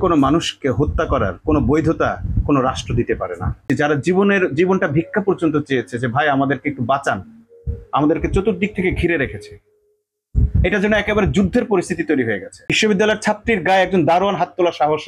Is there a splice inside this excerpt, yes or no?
yes